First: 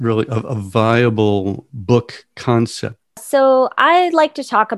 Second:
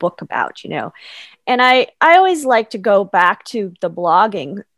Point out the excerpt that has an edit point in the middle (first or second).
first